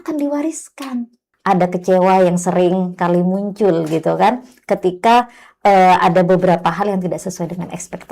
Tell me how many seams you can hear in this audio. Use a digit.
1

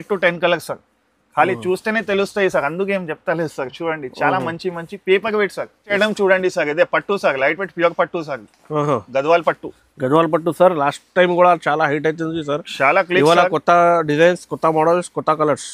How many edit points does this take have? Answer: 1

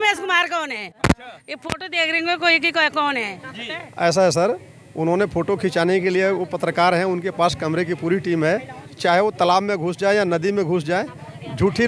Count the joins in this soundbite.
0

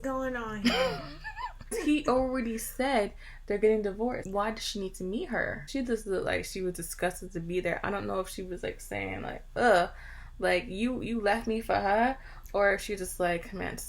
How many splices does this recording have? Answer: 3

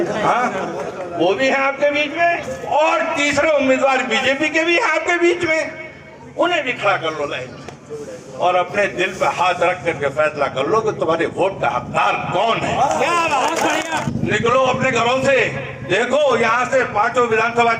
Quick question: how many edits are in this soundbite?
1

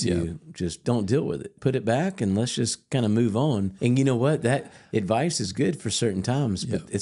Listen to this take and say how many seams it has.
3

